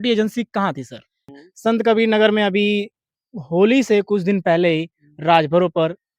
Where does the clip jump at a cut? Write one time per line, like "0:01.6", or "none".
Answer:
0:01.3